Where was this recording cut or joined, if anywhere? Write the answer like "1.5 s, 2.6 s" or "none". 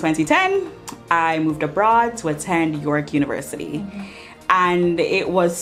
none